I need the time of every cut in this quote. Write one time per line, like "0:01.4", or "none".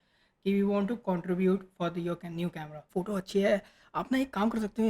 0:02.9